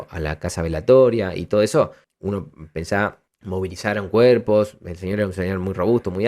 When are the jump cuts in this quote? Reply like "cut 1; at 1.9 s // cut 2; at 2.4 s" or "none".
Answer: cut 1; at 2.1 s // cut 2; at 3.3 s